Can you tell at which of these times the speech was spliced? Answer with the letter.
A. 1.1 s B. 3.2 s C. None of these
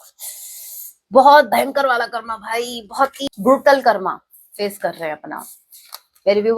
B